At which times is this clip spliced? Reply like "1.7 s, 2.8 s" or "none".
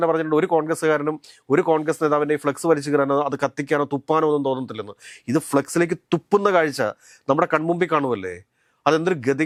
none